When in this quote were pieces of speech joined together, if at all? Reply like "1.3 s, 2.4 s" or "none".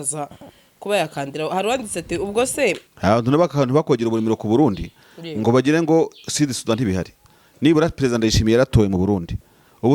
2.9 s